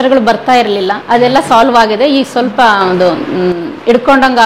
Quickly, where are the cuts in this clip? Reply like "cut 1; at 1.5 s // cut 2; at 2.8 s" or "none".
cut 1; at 1.0 s